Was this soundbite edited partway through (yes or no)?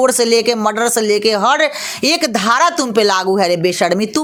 no